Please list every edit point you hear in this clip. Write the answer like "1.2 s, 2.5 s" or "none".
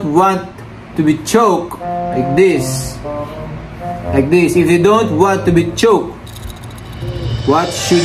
none